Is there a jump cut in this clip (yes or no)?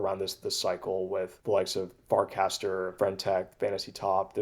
no